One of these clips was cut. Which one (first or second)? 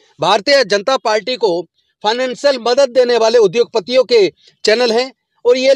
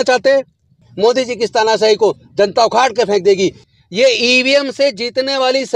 second